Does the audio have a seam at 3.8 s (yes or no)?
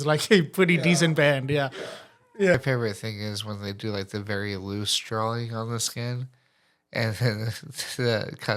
no